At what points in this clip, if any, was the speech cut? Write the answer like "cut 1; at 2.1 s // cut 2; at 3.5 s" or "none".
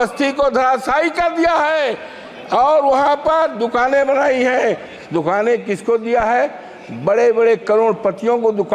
none